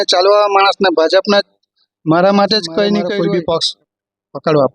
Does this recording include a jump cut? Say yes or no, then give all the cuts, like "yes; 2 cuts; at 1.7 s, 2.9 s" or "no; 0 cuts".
yes; 1 cut; at 3.1 s